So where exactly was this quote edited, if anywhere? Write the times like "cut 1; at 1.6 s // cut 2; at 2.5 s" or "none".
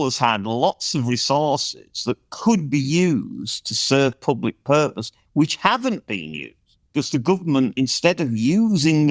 cut 1; at 6.9 s